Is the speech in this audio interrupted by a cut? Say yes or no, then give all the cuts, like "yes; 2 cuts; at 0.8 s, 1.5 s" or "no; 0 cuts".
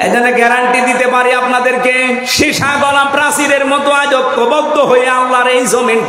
yes; 1 cut; at 1.1 s